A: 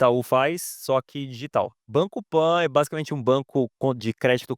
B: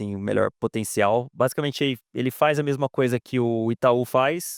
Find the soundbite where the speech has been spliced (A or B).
A